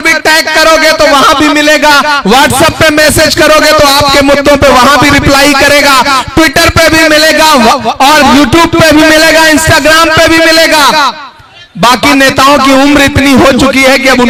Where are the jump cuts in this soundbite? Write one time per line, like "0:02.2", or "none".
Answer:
none